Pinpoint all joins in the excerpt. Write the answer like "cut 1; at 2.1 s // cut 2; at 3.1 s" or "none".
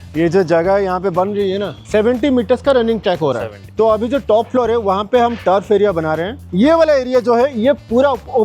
cut 1; at 1.7 s // cut 2; at 3.7 s // cut 3; at 6.4 s